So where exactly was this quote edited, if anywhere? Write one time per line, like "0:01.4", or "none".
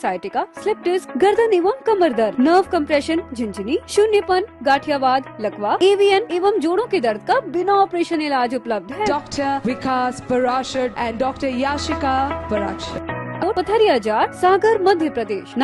0:13.4